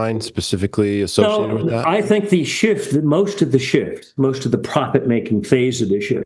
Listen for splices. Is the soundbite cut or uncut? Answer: uncut